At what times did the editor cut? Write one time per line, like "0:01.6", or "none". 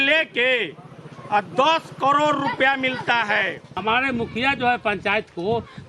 0:03.6